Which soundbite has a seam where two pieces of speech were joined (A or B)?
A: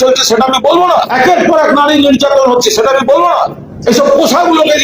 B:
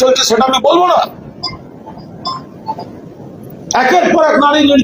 A